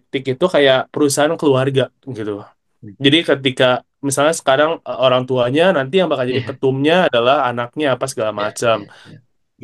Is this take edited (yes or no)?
no